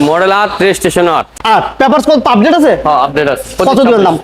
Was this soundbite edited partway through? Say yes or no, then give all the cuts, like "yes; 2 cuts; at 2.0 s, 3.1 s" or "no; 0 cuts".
no; 0 cuts